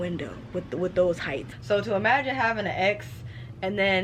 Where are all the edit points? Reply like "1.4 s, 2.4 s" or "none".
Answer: 1.5 s